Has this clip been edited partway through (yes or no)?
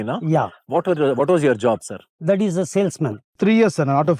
yes